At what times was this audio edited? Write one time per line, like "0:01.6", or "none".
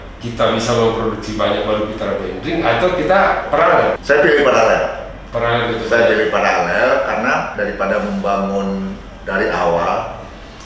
none

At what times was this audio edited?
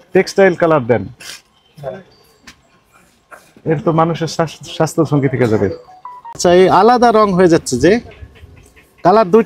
0:06.4

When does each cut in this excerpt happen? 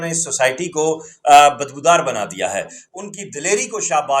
0:02.7

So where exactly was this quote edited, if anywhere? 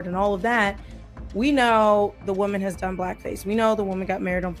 none

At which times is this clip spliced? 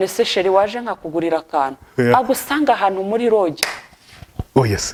none

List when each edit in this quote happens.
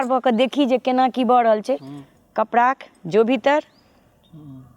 none

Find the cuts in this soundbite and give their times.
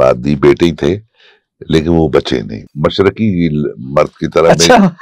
0:02.6

